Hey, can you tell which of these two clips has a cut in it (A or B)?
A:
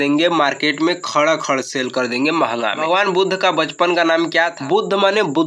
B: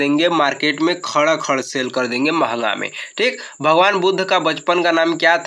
A